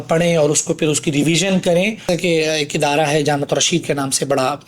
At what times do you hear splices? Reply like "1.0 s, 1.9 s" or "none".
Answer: 2.0 s